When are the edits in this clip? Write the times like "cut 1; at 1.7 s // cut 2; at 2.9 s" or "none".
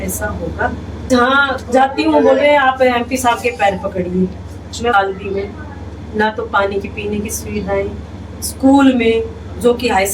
cut 1; at 1.1 s // cut 2; at 4.9 s

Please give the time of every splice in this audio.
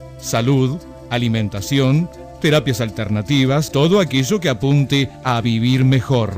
cut 1; at 3.7 s

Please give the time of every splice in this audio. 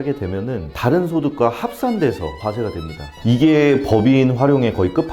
cut 1; at 3.1 s

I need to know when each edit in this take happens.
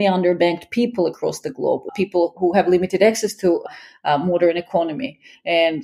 cut 1; at 1.8 s

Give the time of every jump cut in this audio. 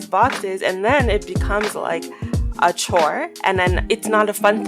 cut 1; at 3.8 s

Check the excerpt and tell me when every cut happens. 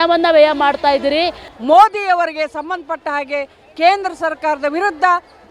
cut 1; at 1.5 s

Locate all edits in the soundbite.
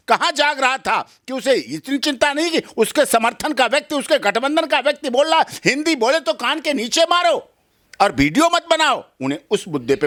none

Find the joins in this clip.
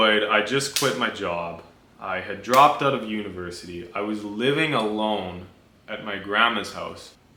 none

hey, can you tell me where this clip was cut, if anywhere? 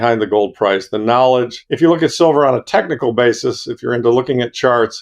cut 1; at 1.6 s

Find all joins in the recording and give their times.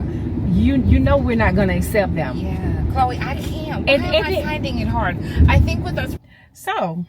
cut 1; at 6.1 s

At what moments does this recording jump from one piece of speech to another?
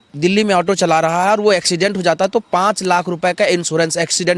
none

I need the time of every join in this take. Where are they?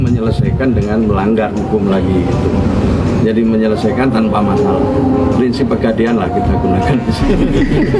none

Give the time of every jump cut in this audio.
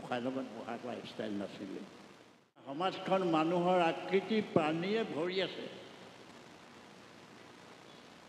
cut 1; at 2.8 s

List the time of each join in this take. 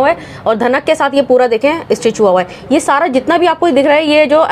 none

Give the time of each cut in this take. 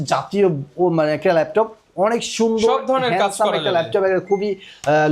none

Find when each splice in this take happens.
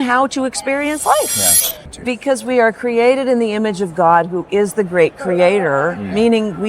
cut 1; at 1.7 s

